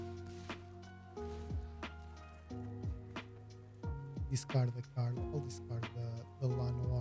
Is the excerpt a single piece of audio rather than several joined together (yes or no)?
no